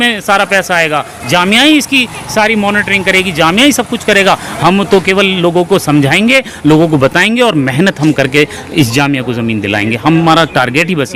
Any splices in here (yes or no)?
no